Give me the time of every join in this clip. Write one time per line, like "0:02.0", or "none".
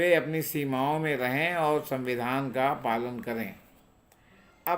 none